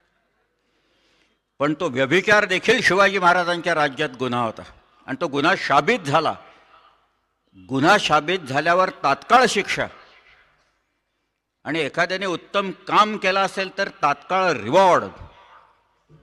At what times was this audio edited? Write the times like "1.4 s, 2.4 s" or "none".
none